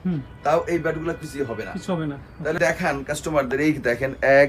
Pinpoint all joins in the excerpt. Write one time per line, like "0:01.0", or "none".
0:02.6